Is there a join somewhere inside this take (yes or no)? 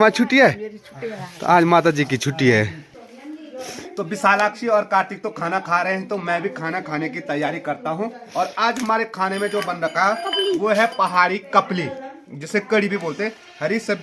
no